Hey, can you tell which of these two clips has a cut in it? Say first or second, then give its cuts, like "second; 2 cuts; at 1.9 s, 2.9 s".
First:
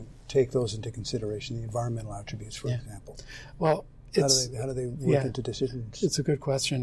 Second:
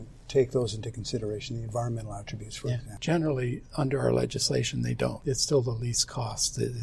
second; 2 cuts; at 2.9 s, 5.2 s